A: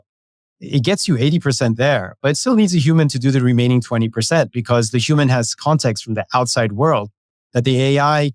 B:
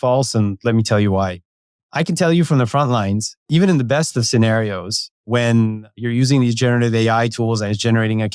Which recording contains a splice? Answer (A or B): B